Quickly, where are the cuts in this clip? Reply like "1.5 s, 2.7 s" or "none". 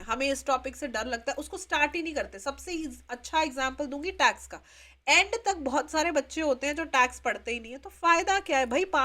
none